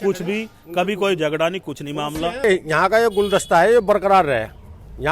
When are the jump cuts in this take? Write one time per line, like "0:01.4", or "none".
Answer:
0:02.4